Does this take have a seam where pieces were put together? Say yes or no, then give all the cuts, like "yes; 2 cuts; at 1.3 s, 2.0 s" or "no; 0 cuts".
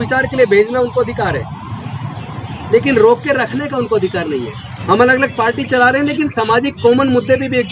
yes; 1 cut; at 4.7 s